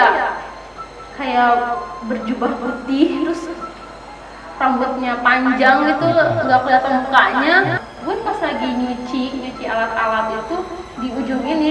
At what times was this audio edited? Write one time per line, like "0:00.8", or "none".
0:07.9